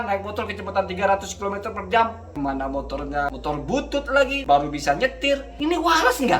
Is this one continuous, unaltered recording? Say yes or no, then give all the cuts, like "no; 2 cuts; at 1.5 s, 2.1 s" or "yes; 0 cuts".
no; 4 cuts; at 2.2 s, 3.3 s, 4.4 s, 5.5 s